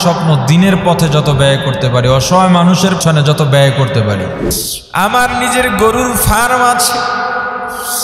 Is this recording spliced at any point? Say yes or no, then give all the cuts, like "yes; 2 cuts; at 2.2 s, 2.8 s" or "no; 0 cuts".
yes; 2 cuts; at 3.0 s, 4.6 s